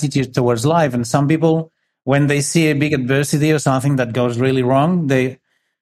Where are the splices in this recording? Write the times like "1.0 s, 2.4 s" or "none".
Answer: none